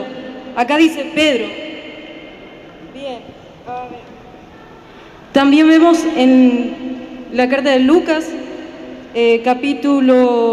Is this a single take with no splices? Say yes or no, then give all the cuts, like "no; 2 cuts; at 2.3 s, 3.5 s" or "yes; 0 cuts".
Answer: yes; 0 cuts